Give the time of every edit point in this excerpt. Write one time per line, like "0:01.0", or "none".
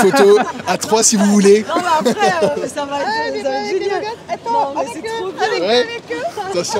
none